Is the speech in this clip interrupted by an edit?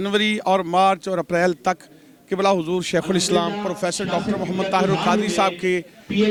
no; 0 cuts

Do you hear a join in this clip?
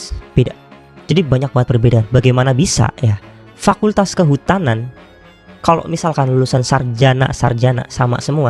no; 0 cuts

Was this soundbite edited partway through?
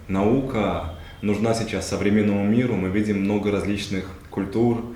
no; 0 cuts

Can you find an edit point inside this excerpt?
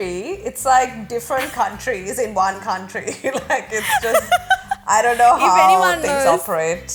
no; 0 cuts

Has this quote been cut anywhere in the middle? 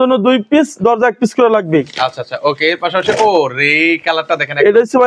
no; 0 cuts

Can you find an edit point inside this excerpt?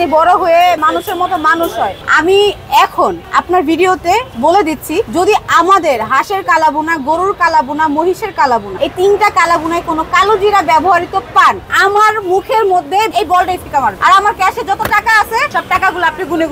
yes; 6 cuts; at 0.8 s, 2.1 s, 5.1 s, 8.7 s, 13.1 s, 15.5 s

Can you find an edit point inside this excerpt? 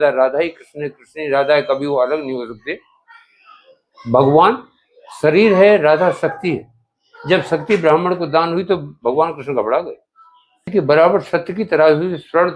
yes; 1 cut; at 10.7 s

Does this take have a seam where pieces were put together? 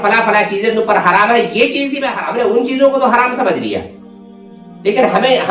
yes; 1 cut; at 2.1 s

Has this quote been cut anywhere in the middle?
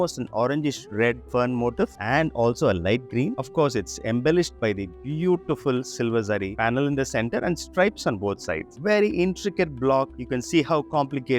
yes; 3 cuts; at 1.2 s, 3.4 s, 8.7 s

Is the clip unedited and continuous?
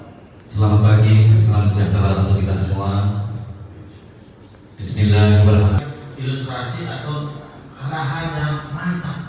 no; 1 cut; at 5.8 s

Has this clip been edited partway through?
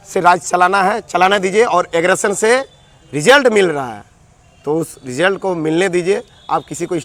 no; 0 cuts

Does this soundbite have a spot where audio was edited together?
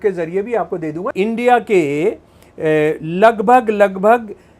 yes; 1 cut; at 1.0 s

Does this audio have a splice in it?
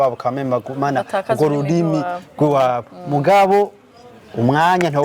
no; 0 cuts

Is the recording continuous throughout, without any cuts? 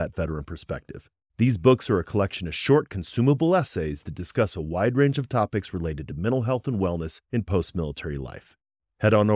yes; 0 cuts

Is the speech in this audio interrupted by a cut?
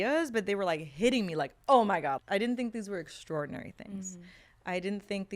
yes; 1 cut; at 2.2 s

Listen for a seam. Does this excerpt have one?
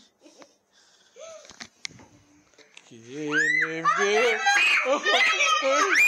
yes; 1 cut; at 2.7 s

